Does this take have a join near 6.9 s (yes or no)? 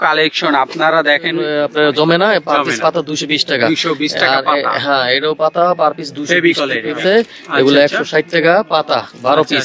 yes